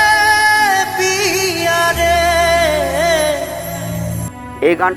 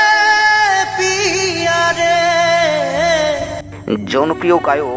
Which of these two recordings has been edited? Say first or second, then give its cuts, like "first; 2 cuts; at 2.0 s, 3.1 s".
second; 1 cut; at 3.7 s